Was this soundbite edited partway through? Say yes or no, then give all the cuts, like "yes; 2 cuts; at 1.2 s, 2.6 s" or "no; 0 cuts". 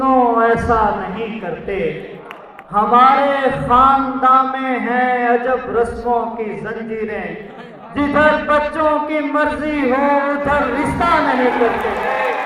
no; 0 cuts